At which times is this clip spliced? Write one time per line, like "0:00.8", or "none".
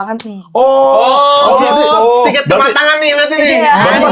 none